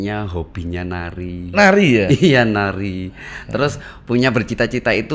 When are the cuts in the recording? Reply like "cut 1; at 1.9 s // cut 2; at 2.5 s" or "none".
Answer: none